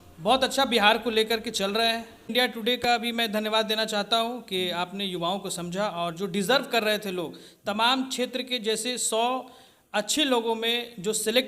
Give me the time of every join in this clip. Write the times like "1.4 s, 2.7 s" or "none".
2.3 s

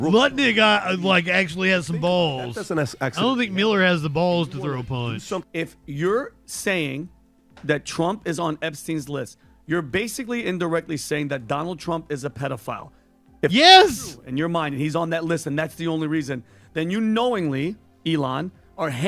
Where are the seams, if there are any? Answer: 5.4 s

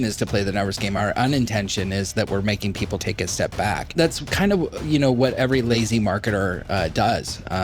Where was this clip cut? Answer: 1.0 s, 3.0 s, 3.9 s, 5.5 s

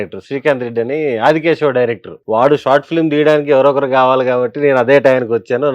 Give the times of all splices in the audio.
2.1 s

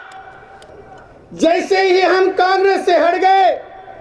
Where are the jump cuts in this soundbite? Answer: none

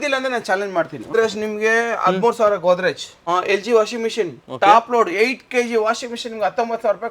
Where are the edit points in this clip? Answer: 1.1 s, 3.1 s

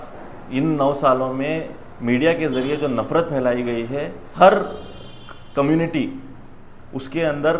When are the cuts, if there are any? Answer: 4.2 s

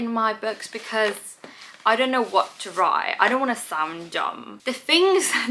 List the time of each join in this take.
none

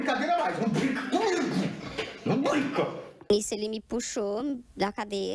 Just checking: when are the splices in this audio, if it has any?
3.0 s

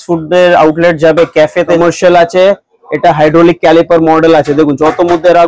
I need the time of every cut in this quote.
1.8 s

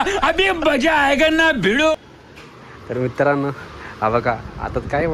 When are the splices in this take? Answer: 2.1 s

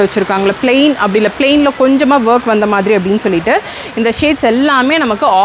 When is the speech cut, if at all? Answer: none

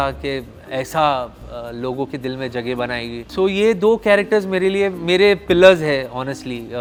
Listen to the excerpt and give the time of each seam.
none

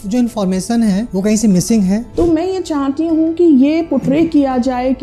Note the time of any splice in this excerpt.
1.1 s, 2.1 s

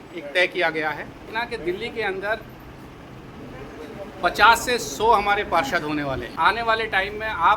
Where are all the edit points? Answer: 1.3 s, 6.3 s

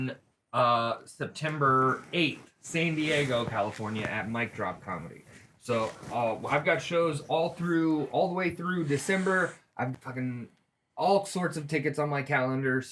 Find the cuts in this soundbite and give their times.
9.9 s

